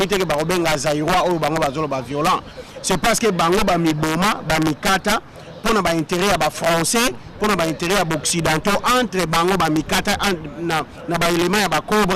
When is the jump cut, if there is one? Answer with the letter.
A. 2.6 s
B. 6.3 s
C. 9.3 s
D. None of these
D